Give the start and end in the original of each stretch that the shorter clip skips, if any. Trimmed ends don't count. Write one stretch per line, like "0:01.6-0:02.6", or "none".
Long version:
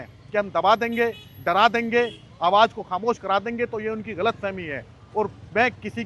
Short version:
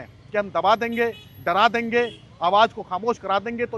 none